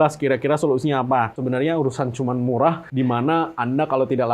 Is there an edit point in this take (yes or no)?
yes